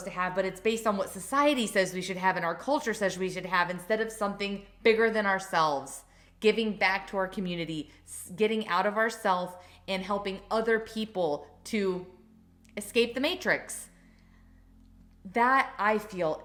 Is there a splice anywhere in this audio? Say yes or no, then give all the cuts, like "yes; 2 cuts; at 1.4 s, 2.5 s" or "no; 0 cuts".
no; 0 cuts